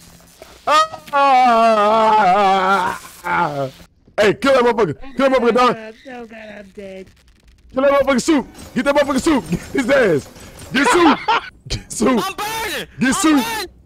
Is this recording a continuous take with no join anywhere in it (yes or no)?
no